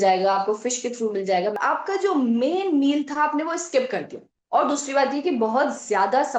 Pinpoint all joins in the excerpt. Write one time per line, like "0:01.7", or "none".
0:01.6
0:04.3